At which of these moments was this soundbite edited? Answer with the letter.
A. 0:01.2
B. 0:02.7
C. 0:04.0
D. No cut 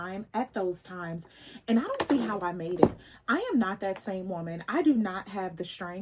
D